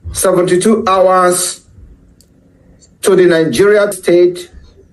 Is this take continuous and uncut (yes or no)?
no